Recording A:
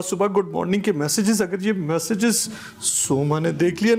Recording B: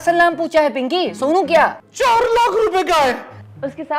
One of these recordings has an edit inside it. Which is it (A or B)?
B